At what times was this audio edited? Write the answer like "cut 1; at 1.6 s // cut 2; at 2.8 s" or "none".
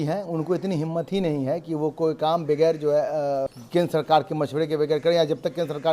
cut 1; at 3.4 s